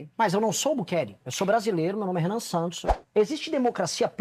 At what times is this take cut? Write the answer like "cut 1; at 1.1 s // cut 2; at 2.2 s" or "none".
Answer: cut 1; at 2.9 s